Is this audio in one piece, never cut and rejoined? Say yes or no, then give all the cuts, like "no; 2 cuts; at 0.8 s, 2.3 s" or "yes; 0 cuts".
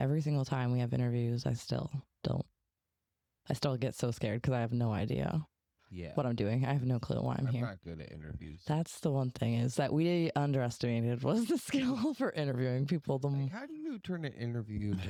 yes; 0 cuts